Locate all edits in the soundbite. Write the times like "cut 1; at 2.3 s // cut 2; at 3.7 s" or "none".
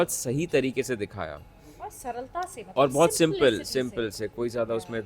none